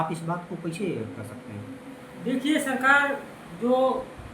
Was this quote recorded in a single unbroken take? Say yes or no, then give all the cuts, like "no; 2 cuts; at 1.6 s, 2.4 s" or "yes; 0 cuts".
yes; 0 cuts